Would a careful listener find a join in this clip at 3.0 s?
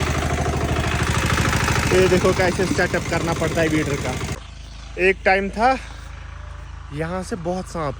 no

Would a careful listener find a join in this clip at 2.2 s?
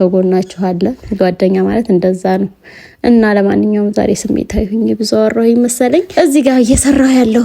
no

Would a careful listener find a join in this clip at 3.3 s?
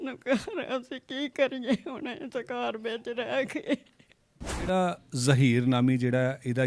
no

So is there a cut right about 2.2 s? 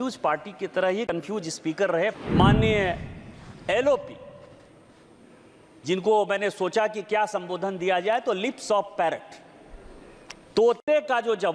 yes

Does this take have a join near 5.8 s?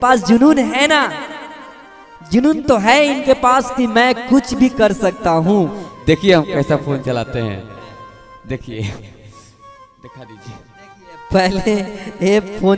yes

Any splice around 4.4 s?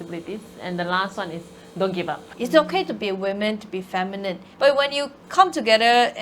yes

